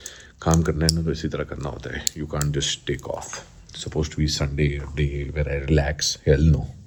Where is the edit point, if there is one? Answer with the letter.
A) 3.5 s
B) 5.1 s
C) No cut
C